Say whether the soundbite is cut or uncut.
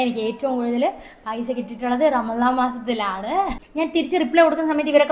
cut